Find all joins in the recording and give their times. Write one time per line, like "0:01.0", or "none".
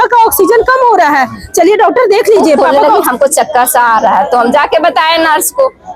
0:02.6

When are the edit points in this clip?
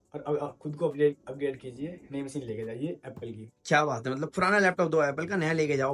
none

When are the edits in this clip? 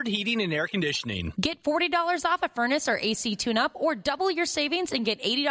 0:01.3

